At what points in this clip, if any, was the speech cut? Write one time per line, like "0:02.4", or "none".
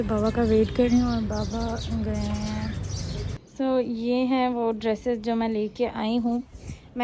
0:03.3